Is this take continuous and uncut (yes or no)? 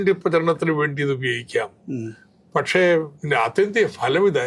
no